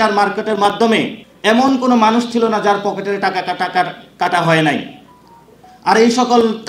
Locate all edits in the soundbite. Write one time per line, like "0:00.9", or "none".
0:01.2